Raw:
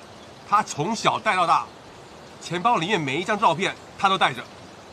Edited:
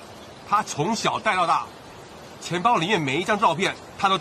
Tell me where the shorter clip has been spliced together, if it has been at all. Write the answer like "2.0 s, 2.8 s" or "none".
none